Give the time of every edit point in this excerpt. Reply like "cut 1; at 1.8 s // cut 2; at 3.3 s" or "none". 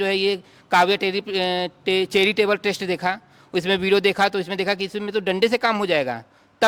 none

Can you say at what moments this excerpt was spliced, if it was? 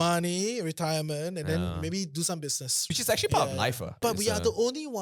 cut 1; at 2.7 s // cut 2; at 4.0 s

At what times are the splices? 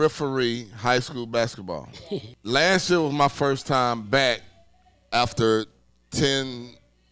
cut 1; at 2.3 s

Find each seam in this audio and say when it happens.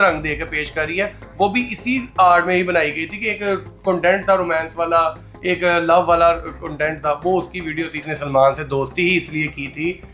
cut 1; at 8.0 s

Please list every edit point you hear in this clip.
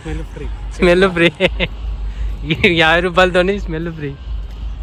none

